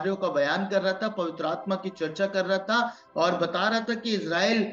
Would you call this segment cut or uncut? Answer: uncut